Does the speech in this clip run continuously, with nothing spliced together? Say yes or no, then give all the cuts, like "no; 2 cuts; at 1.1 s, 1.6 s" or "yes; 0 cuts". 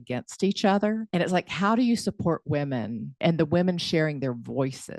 no; 2 cuts; at 1.0 s, 3.2 s